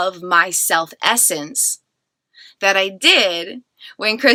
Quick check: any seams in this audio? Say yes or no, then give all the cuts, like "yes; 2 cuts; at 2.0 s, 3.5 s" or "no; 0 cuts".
no; 0 cuts